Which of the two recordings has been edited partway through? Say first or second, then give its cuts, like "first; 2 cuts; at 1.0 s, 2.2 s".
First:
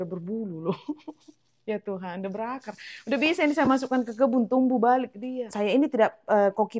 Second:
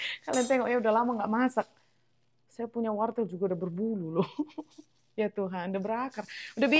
first; 1 cut; at 5.2 s